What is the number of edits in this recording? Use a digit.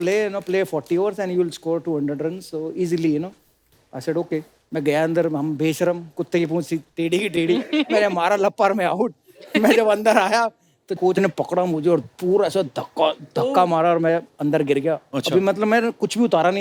0